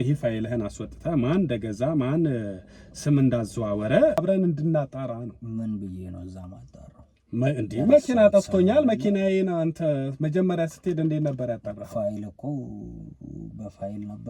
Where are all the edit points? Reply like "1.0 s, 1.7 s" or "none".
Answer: 4.2 s